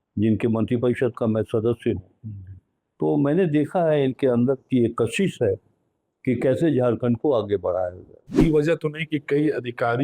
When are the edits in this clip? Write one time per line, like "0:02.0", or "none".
0:08.4